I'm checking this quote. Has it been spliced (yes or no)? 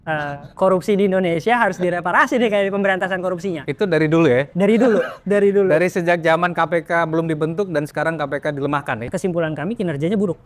yes